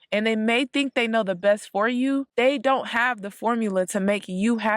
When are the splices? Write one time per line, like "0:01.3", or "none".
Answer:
0:02.3